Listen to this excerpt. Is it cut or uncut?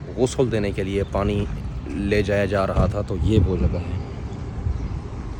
uncut